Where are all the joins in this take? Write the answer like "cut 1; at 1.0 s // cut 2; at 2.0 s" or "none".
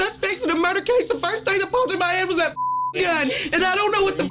cut 1; at 3.3 s